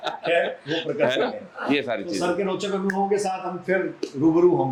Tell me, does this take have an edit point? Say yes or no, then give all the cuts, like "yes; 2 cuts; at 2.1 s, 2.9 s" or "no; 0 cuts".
no; 0 cuts